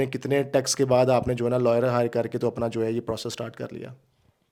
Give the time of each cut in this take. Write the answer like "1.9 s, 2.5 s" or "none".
none